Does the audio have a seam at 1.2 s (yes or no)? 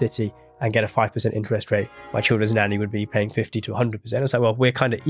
no